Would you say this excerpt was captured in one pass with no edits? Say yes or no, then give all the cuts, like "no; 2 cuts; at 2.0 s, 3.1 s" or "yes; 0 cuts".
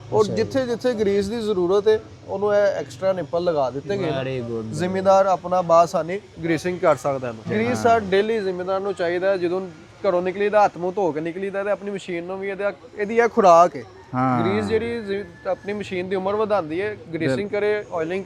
yes; 0 cuts